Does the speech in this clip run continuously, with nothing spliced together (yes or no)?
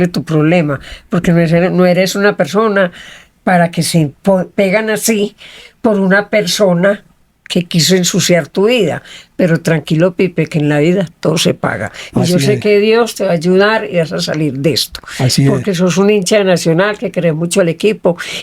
yes